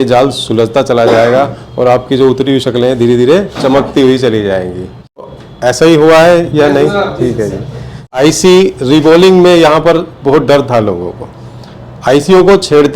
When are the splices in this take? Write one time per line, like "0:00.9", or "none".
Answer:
0:05.2
0:08.1